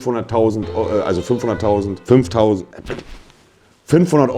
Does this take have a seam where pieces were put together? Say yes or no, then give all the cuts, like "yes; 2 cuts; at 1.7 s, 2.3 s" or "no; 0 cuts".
no; 0 cuts